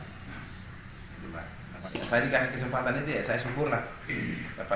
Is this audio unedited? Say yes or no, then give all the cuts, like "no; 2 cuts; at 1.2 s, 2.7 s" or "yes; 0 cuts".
no; 1 cut; at 1.9 s